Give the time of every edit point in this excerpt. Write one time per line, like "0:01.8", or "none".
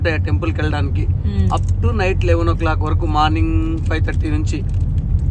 none